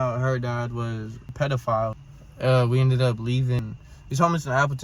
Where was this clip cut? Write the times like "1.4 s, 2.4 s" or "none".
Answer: 1.3 s, 2.0 s, 3.6 s